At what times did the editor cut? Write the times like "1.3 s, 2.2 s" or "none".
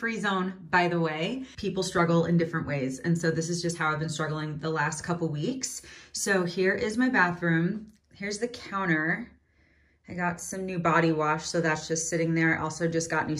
none